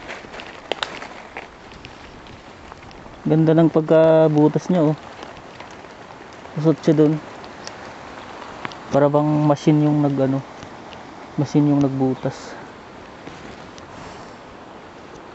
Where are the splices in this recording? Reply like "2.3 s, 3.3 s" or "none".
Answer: none